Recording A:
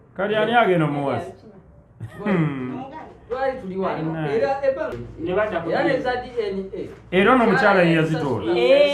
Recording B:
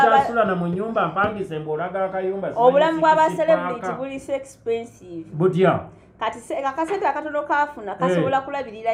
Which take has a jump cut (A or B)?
A